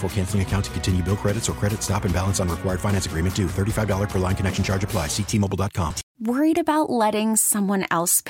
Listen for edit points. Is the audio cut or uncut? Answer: cut